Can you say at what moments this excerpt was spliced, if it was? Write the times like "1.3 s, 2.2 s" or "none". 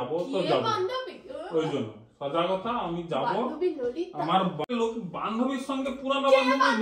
4.7 s